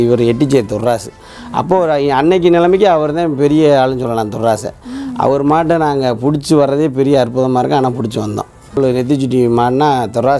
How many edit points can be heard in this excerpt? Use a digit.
1